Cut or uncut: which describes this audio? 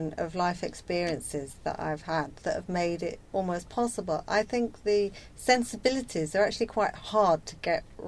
uncut